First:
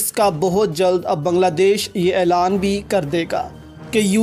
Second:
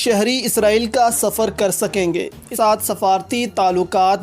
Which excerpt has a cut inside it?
second; 1 cut; at 2.5 s

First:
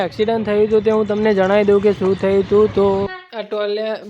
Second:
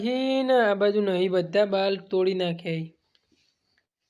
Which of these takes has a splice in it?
first; 1 cut; at 3.1 s

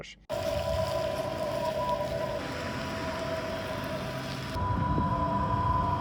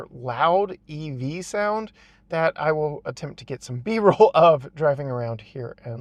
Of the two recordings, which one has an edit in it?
first; 2 cuts; at 2.4 s, 4.6 s

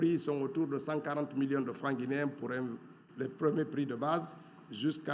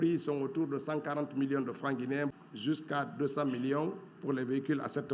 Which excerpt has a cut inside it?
second; 1 cut; at 2.4 s

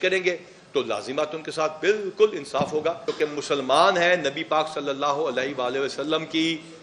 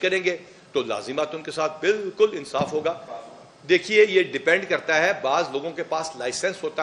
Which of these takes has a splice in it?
first; 1 cut; at 3.1 s

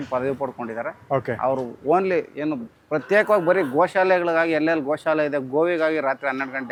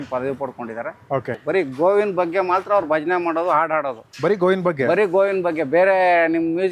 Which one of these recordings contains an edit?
second; 1 cut; at 1.3 s

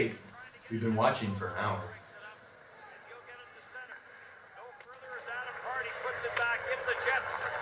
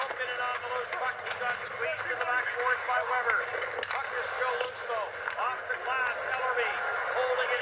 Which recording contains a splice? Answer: first; 1 cut; at 2.0 s

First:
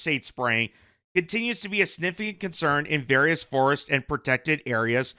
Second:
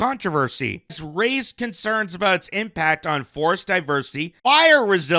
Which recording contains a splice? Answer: second; 2 cuts; at 1.0 s, 4.2 s

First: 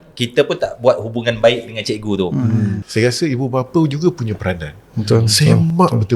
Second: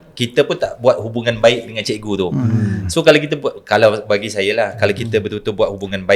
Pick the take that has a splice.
first; 1 cut; at 2.8 s

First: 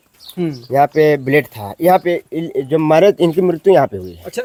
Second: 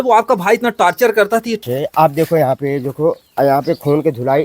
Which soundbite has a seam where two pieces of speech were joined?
second; 1 cut; at 1.6 s

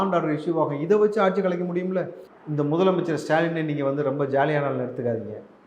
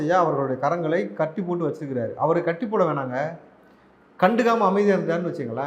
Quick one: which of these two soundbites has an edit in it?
first; 1 cut; at 2.2 s

